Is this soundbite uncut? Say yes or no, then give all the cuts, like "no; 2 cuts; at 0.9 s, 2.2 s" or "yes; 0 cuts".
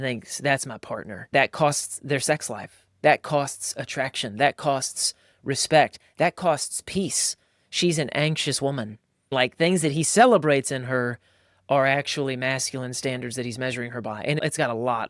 no; 3 cuts; at 1.3 s, 9.3 s, 14.4 s